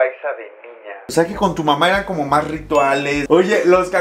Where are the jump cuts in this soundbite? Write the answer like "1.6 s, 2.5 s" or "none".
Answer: 1.0 s, 3.2 s